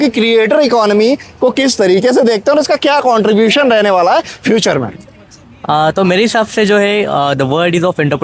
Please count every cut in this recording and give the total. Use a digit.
0